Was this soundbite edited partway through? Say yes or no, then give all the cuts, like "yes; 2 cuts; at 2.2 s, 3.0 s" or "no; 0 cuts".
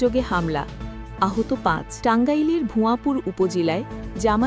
yes; 1 cut; at 1.9 s